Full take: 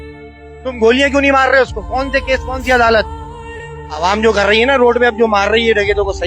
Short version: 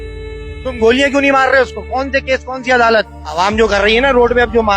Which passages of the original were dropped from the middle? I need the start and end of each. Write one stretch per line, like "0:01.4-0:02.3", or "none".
0:03.2-0:03.8